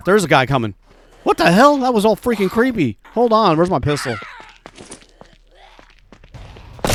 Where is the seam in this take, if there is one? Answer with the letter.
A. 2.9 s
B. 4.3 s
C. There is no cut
C